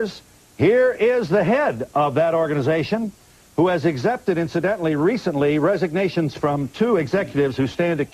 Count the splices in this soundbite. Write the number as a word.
zero